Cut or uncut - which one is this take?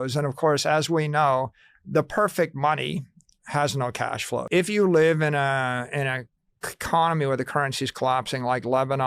cut